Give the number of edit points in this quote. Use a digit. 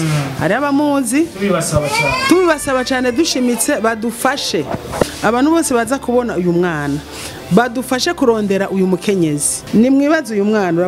2